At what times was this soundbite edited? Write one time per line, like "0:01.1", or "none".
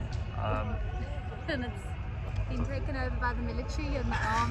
none